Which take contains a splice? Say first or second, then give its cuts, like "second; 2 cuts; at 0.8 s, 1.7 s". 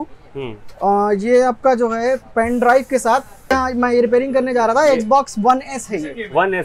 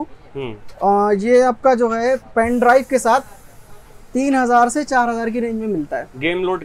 first; 1 cut; at 3.5 s